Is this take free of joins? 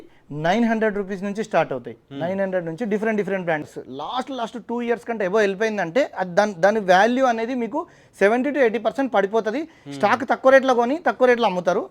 no; 1 cut; at 3.7 s

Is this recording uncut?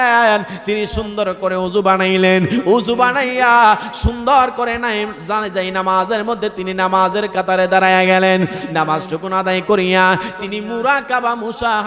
yes; 0 cuts

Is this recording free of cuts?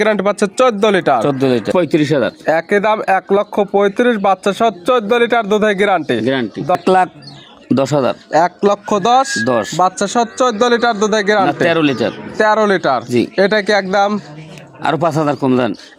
no; 2 cuts; at 1.7 s, 6.8 s

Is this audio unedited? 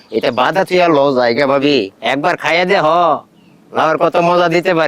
no; 1 cut; at 2.0 s

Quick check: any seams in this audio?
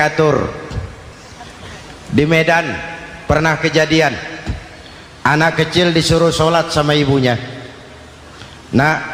no; 0 cuts

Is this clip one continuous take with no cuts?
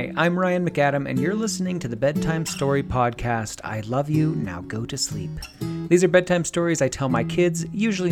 yes; 0 cuts

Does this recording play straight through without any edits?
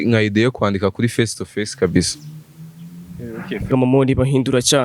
no; 1 cut; at 3.7 s

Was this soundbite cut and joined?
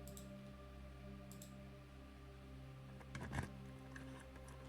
no; 0 cuts

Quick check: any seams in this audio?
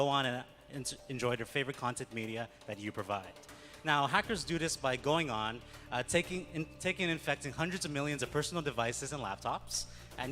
yes; 1 cut; at 5.7 s

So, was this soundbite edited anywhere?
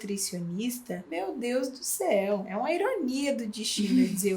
yes; 2 cuts; at 1.1 s, 2.5 s

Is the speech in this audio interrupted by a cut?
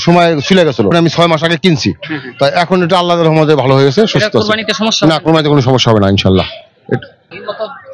no; 0 cuts

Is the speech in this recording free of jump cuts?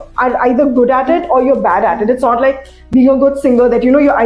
yes; 0 cuts

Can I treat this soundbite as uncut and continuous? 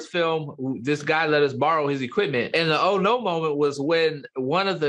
yes; 0 cuts

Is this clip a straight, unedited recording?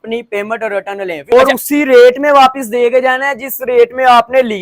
no; 1 cut; at 1.3 s

